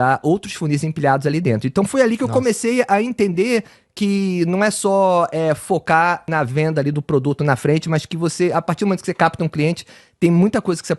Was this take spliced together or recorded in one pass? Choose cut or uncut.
cut